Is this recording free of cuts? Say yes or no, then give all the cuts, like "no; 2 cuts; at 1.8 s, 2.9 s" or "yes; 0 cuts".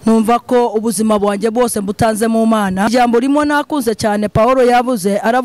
no; 1 cut; at 2.9 s